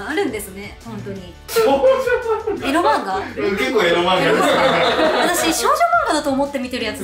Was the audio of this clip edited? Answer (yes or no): yes